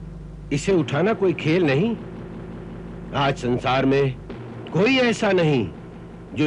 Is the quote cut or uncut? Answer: uncut